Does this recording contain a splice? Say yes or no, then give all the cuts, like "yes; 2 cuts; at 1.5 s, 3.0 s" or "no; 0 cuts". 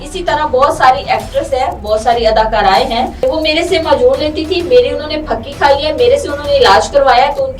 yes; 1 cut; at 3.2 s